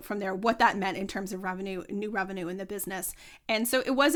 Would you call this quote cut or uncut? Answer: uncut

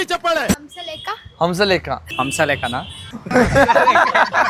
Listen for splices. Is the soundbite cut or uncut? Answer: cut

